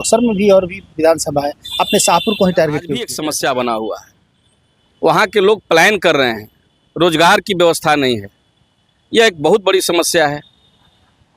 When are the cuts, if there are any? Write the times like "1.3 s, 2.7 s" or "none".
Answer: 3.2 s